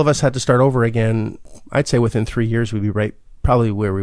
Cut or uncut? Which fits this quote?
cut